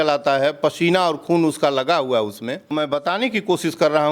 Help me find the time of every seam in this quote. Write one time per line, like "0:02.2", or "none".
0:02.7